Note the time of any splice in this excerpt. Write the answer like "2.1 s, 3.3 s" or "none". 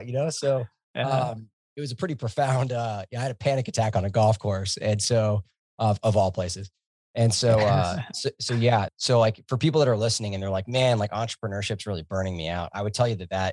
8.9 s